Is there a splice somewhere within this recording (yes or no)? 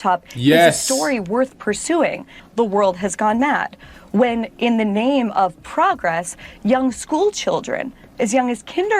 yes